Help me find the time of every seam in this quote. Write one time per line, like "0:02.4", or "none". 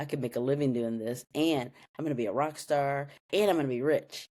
none